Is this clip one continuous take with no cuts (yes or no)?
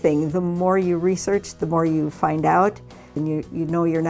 no